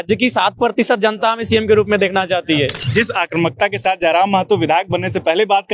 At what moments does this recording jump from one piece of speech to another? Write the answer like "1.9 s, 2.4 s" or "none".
2.8 s